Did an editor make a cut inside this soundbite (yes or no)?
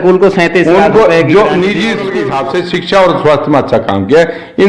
yes